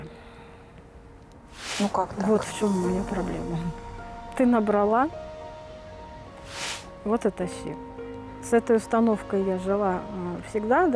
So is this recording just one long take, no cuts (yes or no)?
yes